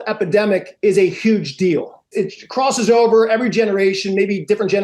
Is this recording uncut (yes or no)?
no